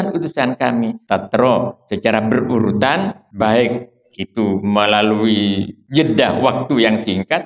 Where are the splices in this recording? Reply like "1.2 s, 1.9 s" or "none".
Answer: 1.0 s, 3.2 s, 5.7 s